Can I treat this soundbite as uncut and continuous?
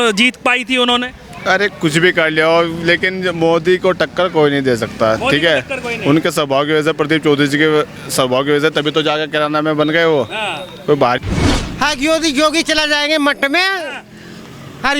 no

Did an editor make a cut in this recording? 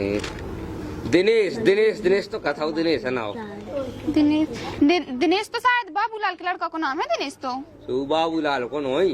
no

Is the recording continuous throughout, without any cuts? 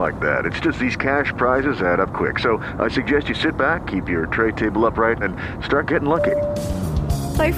yes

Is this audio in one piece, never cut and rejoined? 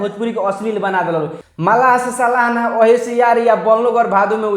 no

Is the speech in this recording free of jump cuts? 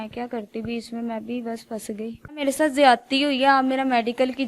no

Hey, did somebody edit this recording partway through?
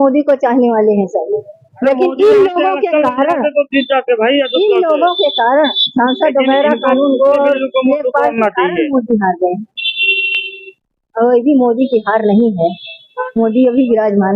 no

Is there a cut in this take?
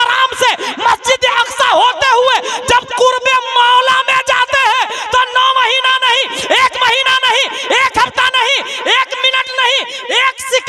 no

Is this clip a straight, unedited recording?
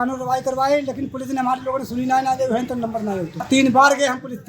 no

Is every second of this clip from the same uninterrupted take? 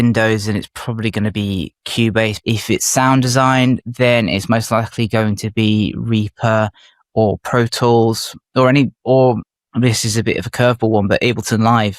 no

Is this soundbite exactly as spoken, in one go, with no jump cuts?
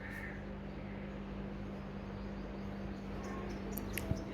no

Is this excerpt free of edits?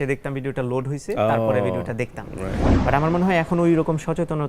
no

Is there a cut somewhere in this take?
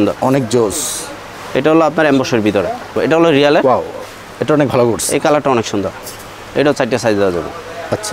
yes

